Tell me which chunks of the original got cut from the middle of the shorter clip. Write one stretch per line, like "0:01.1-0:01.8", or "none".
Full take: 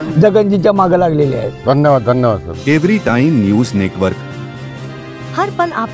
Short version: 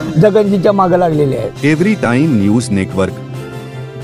0:01.5-0:02.5